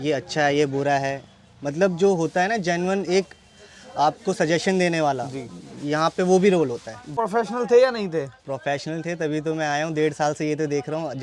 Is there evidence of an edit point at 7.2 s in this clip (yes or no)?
yes